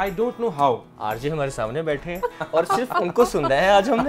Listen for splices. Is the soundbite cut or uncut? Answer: cut